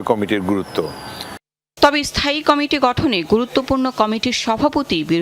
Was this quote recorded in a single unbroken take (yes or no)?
yes